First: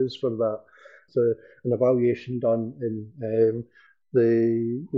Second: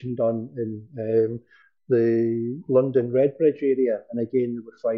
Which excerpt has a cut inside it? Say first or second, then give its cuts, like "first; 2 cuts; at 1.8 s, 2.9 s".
first; 1 cut; at 0.9 s